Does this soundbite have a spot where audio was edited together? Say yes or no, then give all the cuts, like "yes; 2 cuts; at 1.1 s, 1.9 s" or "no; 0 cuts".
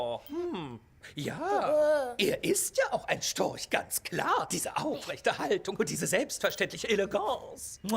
yes; 1 cut; at 5.8 s